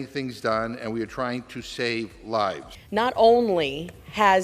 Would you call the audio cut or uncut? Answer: cut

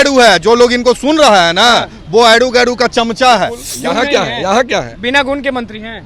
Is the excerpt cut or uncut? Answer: cut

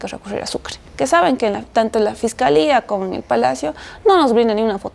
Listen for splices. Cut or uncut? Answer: cut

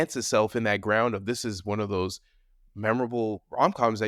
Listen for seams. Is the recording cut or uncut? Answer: uncut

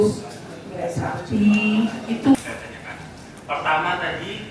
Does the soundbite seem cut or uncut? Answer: cut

